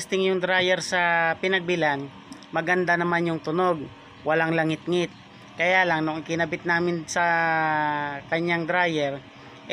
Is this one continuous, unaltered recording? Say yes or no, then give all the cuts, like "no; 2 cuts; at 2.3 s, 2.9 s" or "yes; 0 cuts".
yes; 0 cuts